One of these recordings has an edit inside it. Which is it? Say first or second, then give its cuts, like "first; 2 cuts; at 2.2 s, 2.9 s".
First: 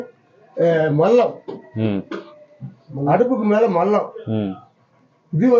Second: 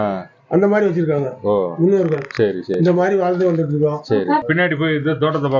second; 1 cut; at 4.4 s